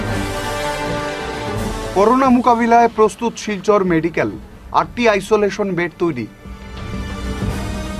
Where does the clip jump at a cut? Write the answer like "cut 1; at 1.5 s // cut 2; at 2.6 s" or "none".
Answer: cut 1; at 1.5 s